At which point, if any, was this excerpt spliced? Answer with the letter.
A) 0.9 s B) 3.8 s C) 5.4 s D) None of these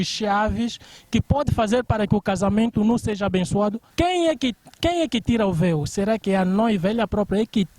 B